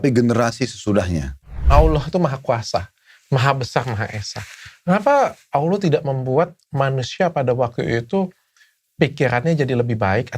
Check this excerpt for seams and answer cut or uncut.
cut